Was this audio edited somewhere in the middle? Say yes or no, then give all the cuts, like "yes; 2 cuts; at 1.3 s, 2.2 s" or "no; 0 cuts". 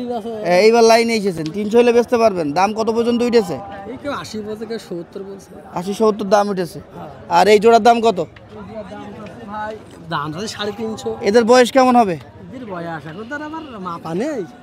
no; 0 cuts